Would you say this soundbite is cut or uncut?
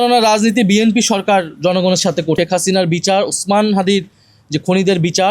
cut